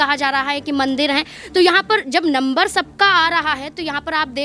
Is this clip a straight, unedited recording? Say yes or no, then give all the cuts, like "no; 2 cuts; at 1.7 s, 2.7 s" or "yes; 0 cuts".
yes; 0 cuts